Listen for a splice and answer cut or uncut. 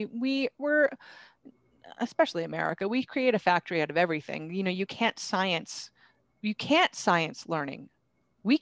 uncut